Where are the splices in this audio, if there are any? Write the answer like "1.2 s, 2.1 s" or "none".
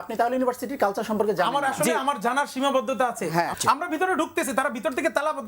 3.5 s